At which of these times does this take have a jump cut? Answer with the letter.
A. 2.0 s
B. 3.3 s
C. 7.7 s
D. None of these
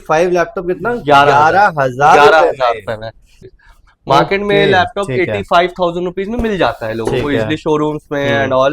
B